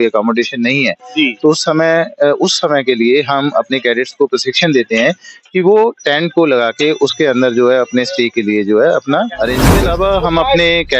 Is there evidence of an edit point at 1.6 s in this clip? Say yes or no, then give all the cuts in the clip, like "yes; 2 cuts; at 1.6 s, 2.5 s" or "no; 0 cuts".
no; 1 cut; at 9.7 s